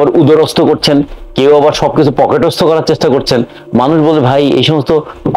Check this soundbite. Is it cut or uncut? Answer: uncut